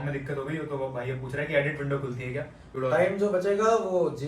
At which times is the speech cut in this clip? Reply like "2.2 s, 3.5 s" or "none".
2.7 s